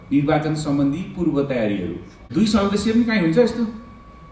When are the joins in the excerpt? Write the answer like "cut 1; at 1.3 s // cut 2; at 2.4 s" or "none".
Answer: cut 1; at 2.3 s

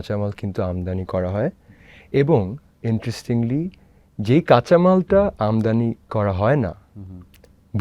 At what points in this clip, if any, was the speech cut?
none

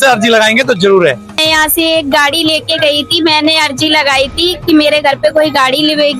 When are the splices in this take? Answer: cut 1; at 1.4 s

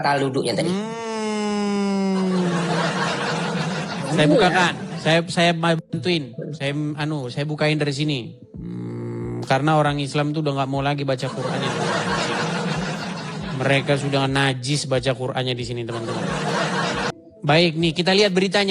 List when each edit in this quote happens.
cut 1; at 17.1 s

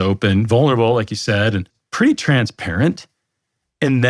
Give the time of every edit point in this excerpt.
cut 1; at 1.8 s

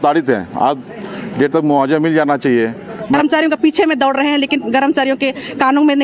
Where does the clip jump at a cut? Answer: cut 1; at 3.2 s

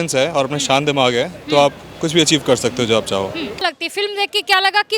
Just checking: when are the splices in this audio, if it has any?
cut 1; at 3.6 s

